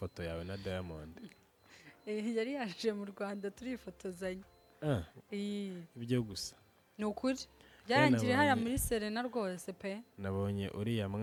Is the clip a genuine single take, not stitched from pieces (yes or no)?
yes